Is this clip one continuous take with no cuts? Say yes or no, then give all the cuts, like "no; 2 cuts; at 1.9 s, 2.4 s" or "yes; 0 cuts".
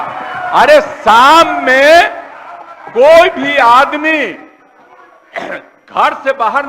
yes; 0 cuts